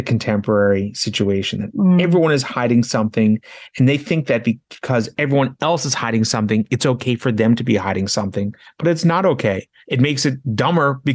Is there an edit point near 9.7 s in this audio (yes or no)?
yes